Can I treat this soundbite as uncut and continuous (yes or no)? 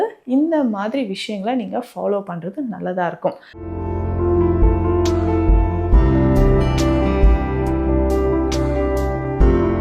no